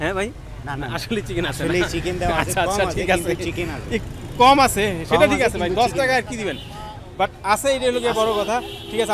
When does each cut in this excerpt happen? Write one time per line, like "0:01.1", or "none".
none

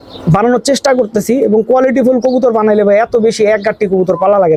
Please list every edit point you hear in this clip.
none

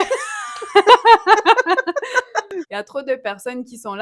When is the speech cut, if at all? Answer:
0:02.6

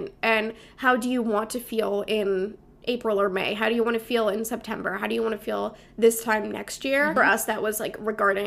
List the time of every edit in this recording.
0:07.1

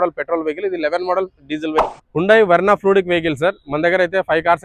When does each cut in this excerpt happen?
0:01.9

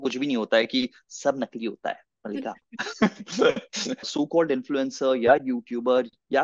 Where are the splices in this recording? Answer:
0:04.1

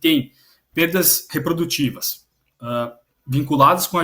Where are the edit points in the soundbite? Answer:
0:01.2

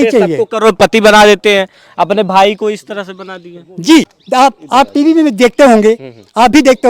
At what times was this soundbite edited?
0:04.2

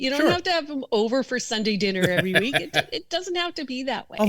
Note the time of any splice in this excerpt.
none

